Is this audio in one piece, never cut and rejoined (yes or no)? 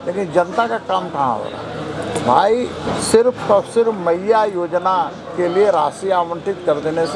yes